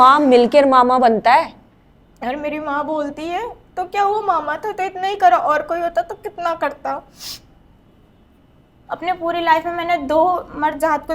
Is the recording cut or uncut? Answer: cut